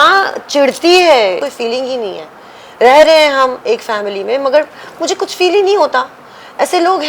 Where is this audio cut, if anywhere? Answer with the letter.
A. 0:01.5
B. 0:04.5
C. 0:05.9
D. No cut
A